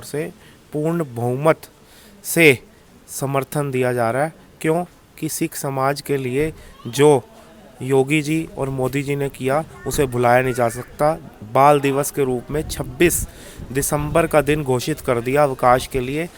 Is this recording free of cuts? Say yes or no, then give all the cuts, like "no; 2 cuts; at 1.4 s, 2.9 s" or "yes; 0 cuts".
yes; 0 cuts